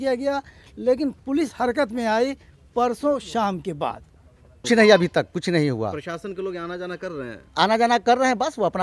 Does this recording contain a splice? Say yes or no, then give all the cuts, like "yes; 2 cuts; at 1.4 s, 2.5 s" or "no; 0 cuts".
yes; 1 cut; at 4.7 s